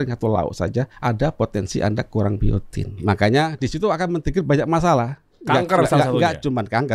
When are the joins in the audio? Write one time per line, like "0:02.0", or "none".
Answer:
0:00.9
0:03.0